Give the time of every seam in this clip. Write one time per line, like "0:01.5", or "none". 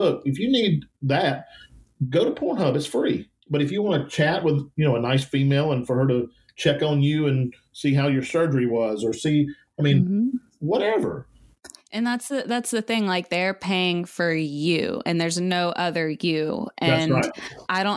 0:03.4
0:04.7